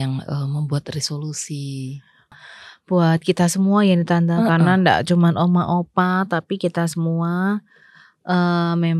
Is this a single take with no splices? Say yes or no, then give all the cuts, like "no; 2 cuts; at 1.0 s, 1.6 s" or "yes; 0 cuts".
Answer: no; 1 cut; at 2.3 s